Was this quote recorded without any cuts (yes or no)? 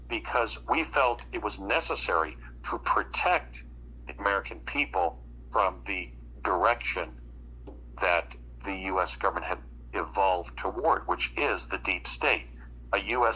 yes